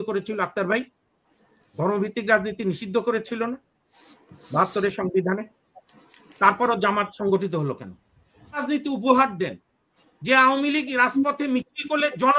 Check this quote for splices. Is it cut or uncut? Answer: cut